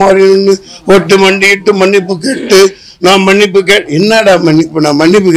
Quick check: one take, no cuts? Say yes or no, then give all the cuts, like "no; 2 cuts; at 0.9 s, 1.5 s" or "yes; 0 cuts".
yes; 0 cuts